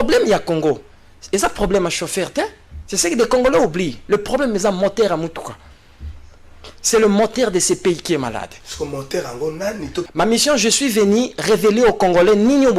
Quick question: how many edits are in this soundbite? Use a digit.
1